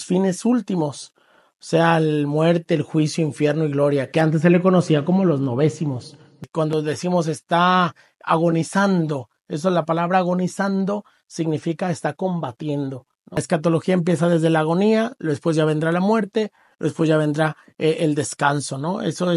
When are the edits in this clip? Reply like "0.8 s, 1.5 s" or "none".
6.5 s, 13.4 s